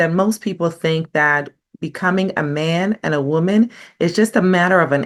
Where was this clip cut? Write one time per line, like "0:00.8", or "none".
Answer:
none